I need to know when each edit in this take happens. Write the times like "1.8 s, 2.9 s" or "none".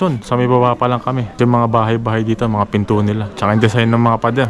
1.3 s